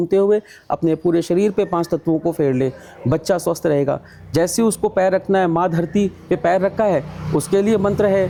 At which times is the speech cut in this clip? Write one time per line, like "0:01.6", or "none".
none